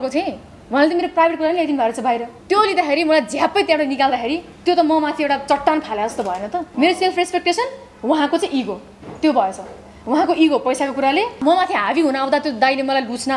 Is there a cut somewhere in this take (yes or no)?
yes